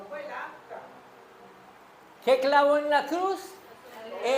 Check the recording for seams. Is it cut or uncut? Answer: uncut